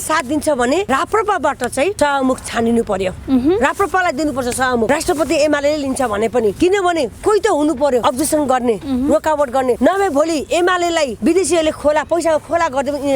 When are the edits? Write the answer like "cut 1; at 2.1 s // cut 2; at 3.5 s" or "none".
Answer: cut 1; at 0.9 s // cut 2; at 1.9 s // cut 3; at 4.9 s // cut 4; at 6.5 s // cut 5; at 8.0 s // cut 6; at 9.8 s // cut 7; at 11.2 s